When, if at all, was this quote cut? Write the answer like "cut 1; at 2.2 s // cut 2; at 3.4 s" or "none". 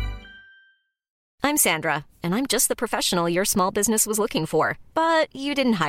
cut 1; at 1.1 s